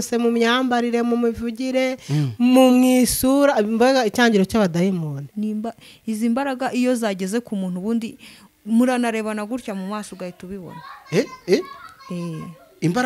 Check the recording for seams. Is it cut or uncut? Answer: cut